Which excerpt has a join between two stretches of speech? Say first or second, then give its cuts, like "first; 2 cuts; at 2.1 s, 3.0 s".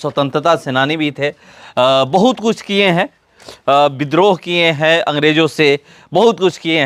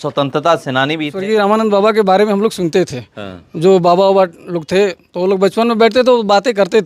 second; 1 cut; at 1.2 s